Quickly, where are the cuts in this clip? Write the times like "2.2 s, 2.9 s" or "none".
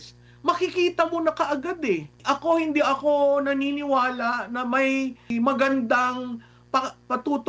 2.2 s, 5.3 s